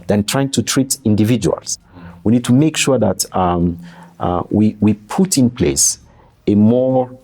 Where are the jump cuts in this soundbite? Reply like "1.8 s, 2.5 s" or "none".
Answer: 1.8 s